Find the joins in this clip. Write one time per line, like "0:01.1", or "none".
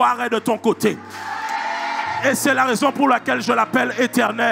0:02.1